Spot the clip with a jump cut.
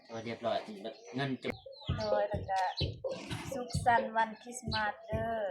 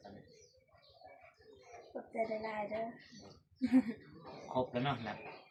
first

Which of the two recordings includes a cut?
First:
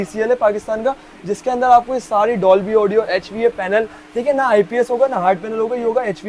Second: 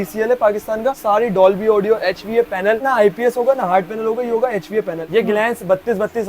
second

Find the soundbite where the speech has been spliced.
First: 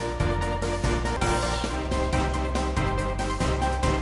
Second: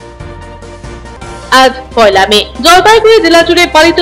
second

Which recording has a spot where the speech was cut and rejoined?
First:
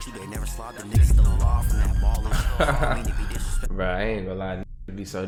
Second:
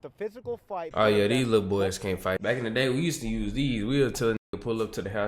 second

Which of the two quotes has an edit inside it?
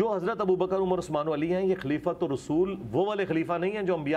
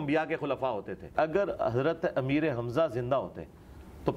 second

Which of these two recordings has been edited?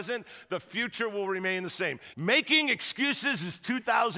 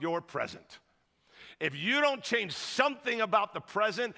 first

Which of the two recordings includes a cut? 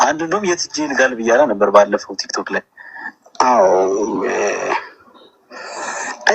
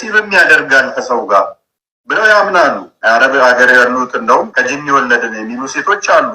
second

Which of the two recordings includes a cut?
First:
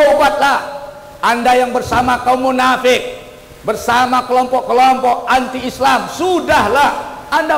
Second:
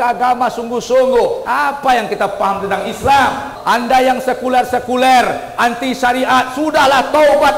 second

